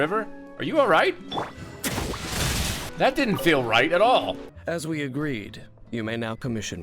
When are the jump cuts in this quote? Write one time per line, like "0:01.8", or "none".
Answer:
0:02.9
0:04.5